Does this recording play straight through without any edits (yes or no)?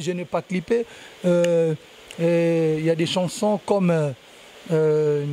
yes